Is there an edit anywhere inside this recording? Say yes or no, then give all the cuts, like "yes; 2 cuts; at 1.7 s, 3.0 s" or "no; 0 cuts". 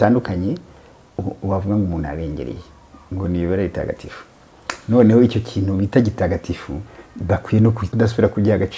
yes; 1 cut; at 7.8 s